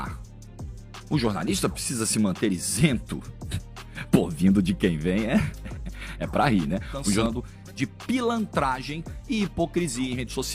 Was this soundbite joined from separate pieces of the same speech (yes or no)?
yes